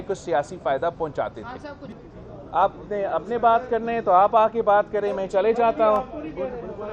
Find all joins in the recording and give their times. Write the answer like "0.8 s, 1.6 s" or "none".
1.9 s